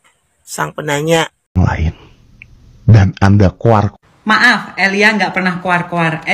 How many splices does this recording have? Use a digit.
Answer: 1